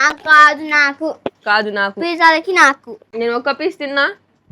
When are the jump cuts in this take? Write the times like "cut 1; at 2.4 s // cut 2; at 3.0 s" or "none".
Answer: cut 1; at 3.0 s